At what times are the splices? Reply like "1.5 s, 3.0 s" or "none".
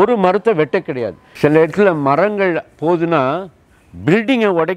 1.2 s